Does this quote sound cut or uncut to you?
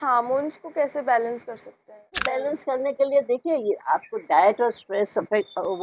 cut